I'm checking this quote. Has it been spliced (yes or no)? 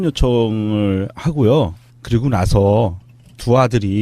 yes